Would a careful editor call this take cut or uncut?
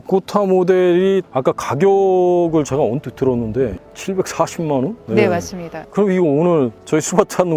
cut